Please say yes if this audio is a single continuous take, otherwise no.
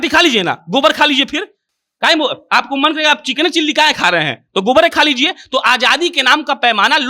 yes